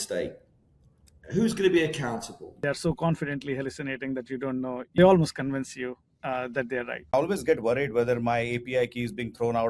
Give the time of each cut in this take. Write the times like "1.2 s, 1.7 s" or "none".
2.6 s, 5.0 s, 7.1 s